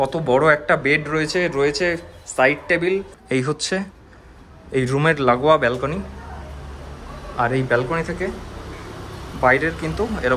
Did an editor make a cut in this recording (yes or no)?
yes